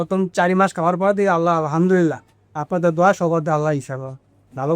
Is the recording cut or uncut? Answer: uncut